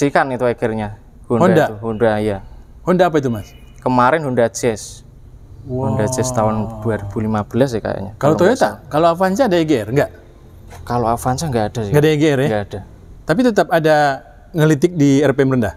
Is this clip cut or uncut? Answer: uncut